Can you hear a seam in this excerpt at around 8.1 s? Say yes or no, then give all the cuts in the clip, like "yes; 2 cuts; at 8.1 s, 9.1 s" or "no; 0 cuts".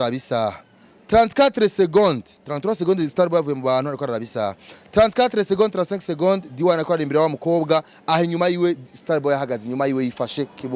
no; 0 cuts